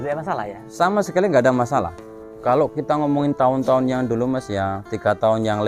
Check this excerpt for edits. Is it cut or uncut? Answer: cut